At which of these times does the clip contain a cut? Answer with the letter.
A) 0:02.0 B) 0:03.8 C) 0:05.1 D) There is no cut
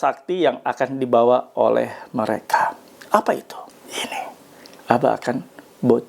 B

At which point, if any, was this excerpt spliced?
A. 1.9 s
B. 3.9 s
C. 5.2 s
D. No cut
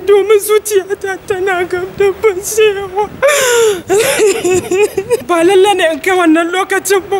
C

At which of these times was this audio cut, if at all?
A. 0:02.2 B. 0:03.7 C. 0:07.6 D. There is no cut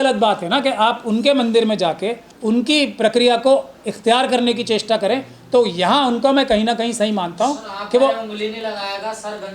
D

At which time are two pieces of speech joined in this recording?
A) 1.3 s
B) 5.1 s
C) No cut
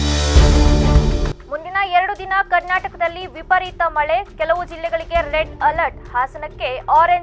A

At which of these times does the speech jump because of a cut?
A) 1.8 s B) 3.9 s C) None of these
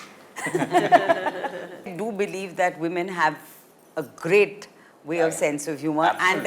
A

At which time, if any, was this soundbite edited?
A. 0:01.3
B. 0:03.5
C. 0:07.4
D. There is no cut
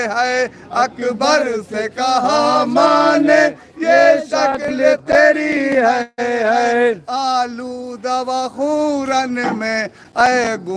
D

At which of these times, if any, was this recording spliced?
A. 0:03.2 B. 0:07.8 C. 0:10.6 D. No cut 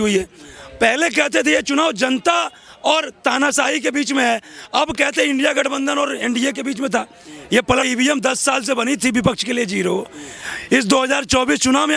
B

